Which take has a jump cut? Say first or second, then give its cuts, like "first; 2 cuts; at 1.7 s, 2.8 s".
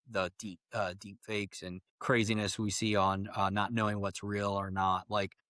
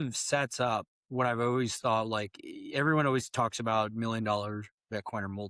first; 1 cut; at 1.9 s